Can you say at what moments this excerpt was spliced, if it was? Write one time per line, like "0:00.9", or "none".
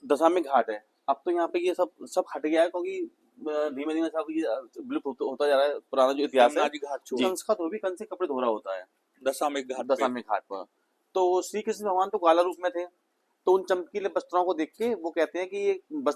0:07.3